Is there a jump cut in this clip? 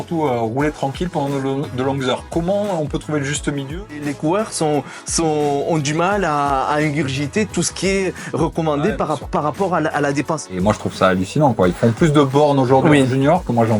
yes; 2 cuts; at 3.8 s, 10.4 s

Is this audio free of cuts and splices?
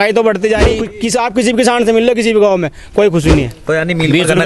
no; 2 cuts; at 0.9 s, 3.6 s

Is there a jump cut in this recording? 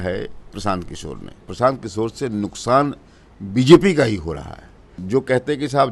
yes; 2 cuts; at 1.4 s, 4.9 s

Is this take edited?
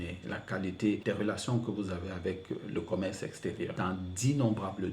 yes; 2 cuts; at 1.0 s, 3.7 s

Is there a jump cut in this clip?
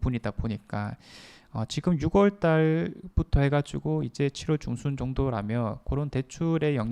no; 0 cuts

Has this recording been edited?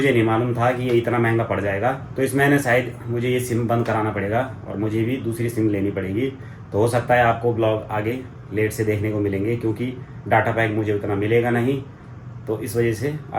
no; 0 cuts

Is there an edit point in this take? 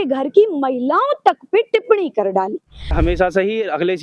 yes; 1 cut; at 2.9 s

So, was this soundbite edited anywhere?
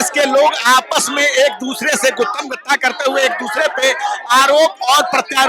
no; 0 cuts

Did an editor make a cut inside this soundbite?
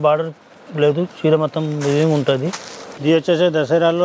yes; 1 cut; at 2.9 s

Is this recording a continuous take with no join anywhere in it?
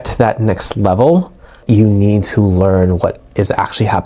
no; 1 cut; at 1.6 s

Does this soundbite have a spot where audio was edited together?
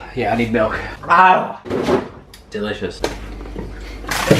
yes; 1 cut; at 2.8 s

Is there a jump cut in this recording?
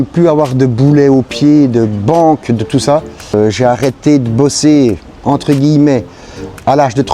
yes; 1 cut; at 3.3 s

